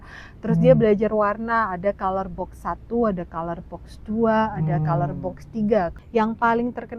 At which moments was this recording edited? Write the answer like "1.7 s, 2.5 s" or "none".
6.0 s